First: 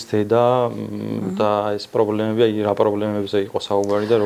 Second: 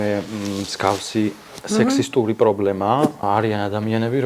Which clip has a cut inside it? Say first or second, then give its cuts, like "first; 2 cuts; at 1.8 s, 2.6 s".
second; 1 cut; at 3.2 s